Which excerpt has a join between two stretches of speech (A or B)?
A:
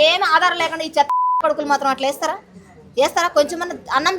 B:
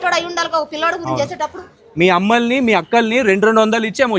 B